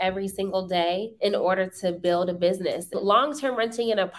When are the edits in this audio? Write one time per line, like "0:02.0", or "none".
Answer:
0:01.1
0:03.0